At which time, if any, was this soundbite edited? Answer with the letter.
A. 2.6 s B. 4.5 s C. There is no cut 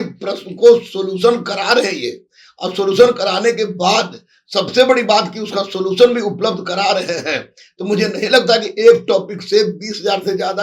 C